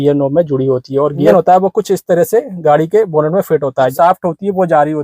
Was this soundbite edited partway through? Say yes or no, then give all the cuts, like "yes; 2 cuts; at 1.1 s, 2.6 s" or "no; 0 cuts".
yes; 2 cuts; at 1.3 s, 3.9 s